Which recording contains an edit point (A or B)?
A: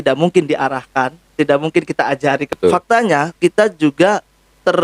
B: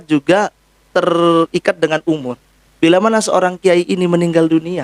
A